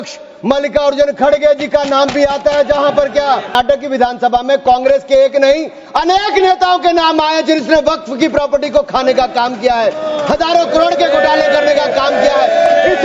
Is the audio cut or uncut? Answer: cut